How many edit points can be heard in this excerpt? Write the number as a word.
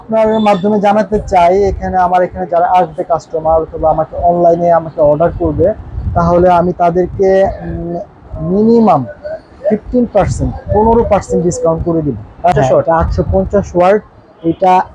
one